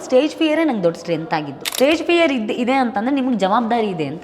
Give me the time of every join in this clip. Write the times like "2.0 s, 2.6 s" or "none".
1.7 s